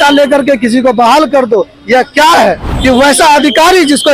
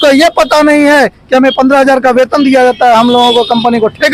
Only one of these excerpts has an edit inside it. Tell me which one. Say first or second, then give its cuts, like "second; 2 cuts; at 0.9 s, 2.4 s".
first; 1 cut; at 2.7 s